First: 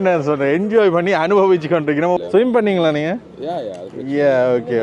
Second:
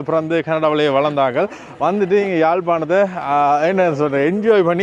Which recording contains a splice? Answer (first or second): first